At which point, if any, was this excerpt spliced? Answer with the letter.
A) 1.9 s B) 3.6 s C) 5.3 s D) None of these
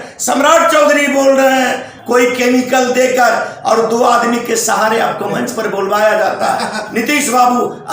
A